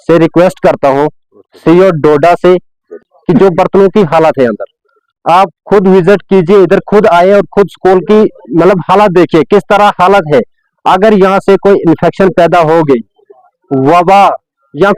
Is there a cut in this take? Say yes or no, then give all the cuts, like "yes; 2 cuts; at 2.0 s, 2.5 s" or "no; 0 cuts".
yes; 1 cut; at 3.1 s